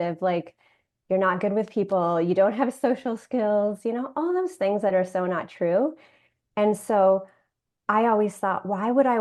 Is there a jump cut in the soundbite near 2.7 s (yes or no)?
no